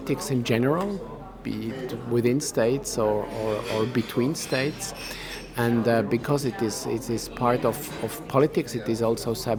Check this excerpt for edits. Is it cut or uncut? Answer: uncut